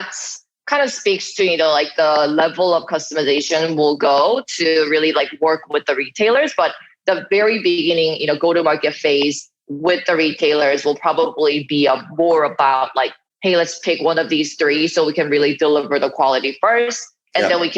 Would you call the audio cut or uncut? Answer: uncut